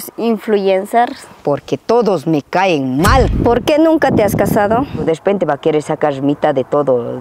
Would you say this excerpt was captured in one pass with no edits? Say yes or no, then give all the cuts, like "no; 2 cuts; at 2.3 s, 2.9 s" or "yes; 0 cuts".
no; 3 cuts; at 1.3 s, 3.3 s, 5.0 s